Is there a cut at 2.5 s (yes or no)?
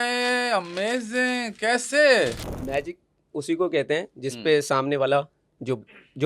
yes